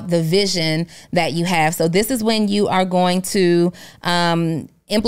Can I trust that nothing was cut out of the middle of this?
yes; 0 cuts

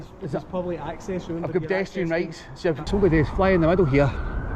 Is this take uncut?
no; 1 cut; at 2.9 s

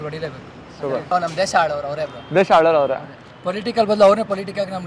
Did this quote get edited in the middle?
yes; 1 cut; at 1.0 s

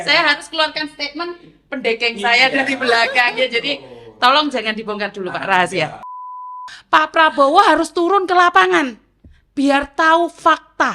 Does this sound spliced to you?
yes; 1 cut; at 6.5 s

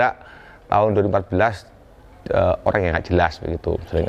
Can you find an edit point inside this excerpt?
no; 0 cuts

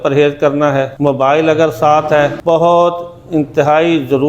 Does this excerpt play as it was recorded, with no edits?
no; 2 cuts; at 0.9 s, 2.4 s

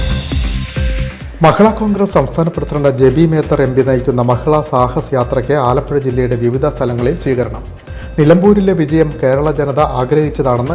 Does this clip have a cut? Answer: no; 0 cuts

